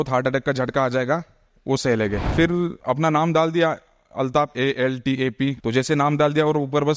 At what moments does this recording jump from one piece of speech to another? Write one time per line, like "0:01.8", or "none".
0:02.7
0:05.6